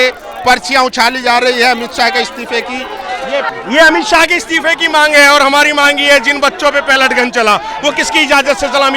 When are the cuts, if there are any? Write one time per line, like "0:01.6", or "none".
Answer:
0:03.5

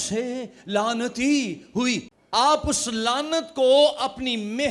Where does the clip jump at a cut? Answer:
0:02.1

